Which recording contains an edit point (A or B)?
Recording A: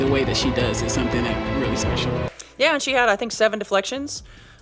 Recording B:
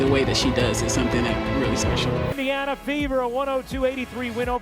A